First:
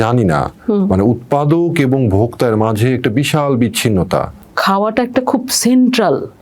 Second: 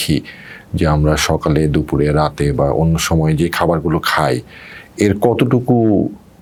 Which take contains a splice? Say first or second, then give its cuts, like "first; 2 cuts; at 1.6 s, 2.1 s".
first; 1 cut; at 4.4 s